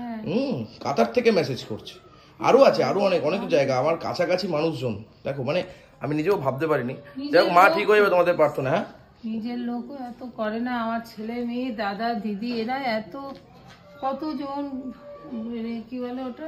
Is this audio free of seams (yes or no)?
yes